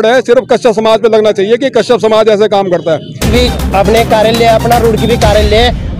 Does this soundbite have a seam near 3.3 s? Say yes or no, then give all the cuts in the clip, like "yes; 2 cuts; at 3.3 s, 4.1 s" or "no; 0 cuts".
yes; 1 cut; at 3.3 s